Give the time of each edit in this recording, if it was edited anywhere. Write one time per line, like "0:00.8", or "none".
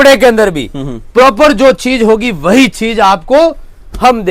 none